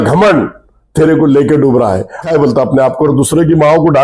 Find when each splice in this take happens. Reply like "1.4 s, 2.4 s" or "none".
2.2 s